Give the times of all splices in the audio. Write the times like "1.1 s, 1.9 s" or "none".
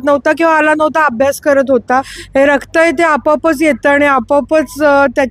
2.2 s